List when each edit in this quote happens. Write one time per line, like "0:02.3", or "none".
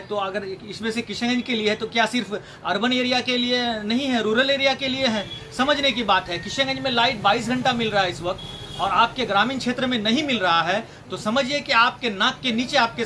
none